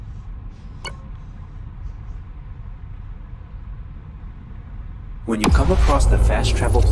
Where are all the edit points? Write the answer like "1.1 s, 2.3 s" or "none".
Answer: none